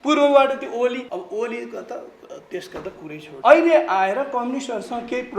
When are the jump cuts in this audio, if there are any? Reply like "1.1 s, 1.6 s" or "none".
1.1 s, 3.3 s